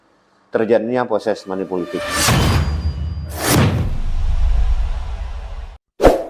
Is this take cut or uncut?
cut